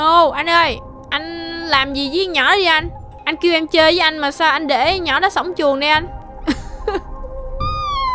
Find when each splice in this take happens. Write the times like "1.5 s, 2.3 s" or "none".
6.2 s